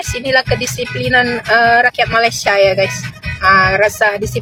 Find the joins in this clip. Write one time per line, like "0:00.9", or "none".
none